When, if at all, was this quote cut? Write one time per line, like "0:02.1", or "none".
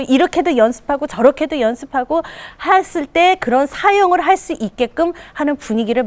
none